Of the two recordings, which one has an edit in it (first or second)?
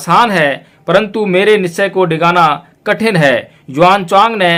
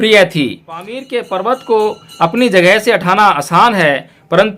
second